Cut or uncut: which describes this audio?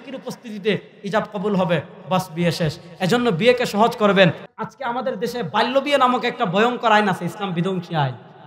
cut